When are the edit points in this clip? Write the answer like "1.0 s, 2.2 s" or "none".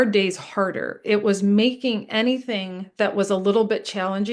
none